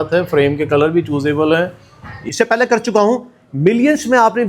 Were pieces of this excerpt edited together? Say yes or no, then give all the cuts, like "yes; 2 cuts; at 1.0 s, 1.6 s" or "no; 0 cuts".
yes; 1 cut; at 2.2 s